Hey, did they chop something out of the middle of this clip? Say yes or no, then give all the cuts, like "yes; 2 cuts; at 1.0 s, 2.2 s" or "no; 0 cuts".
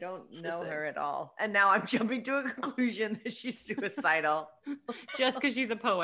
no; 0 cuts